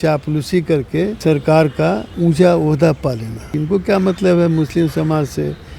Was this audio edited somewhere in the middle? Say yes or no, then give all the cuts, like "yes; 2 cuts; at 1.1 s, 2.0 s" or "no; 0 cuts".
yes; 3 cuts; at 1.2 s, 2.1 s, 3.5 s